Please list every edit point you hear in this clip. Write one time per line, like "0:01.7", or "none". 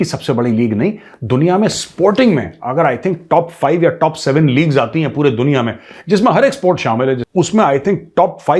0:07.2